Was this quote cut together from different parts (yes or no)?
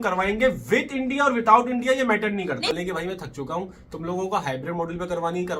yes